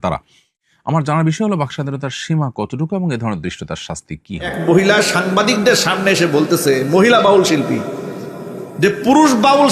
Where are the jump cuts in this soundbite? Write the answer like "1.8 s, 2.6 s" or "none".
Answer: 4.6 s